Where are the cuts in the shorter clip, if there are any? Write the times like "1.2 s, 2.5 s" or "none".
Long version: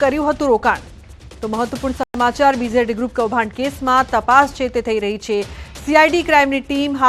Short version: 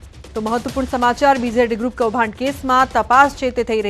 1.0 s

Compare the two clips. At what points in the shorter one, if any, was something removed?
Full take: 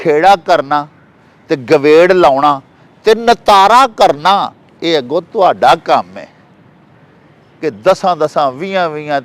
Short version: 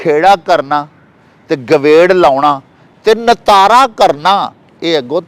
none

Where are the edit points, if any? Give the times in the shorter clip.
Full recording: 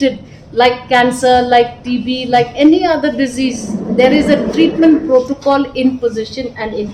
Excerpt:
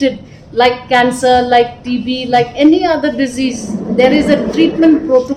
none

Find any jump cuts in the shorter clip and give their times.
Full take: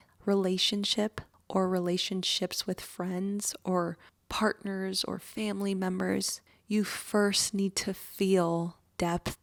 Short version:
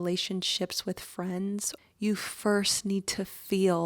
1.7 s

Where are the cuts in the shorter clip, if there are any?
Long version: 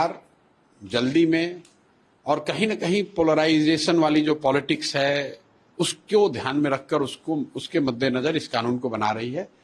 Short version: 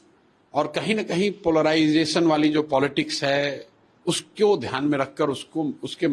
none

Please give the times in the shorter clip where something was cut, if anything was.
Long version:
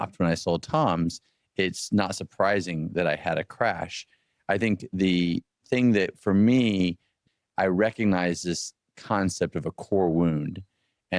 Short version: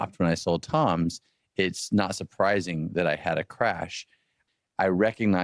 4.3 s

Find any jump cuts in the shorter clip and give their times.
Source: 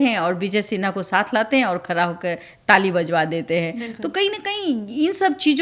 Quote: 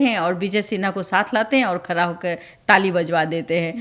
none

